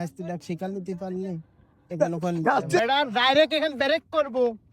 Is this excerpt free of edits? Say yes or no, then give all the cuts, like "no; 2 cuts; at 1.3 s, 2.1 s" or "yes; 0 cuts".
no; 1 cut; at 2.8 s